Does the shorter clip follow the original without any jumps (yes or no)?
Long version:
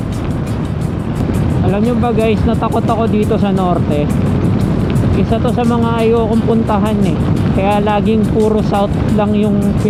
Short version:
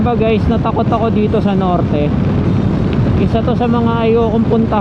yes